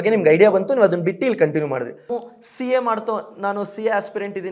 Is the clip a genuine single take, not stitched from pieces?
no; 1 cut; at 2.1 s

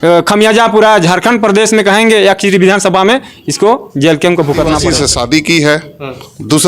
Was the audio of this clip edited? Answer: yes; 1 cut; at 4.9 s

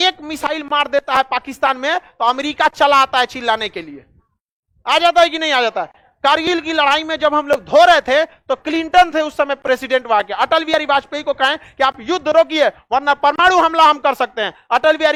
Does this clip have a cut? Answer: no; 0 cuts

